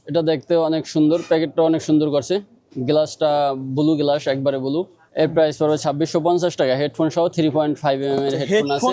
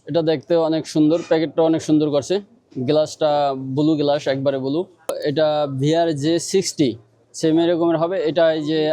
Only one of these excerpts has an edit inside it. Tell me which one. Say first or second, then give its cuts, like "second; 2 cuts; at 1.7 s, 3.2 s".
second; 1 cut; at 5.1 s